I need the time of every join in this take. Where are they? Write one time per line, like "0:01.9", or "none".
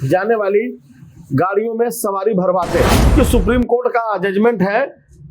0:03.1